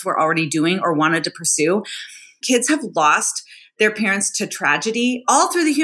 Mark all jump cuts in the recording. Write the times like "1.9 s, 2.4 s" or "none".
2.4 s